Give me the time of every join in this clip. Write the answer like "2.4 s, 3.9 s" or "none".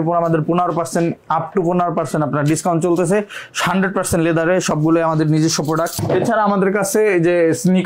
6.0 s